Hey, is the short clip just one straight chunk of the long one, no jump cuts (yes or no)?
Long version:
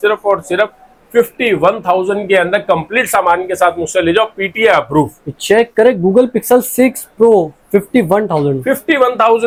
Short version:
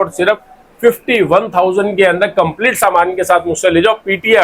yes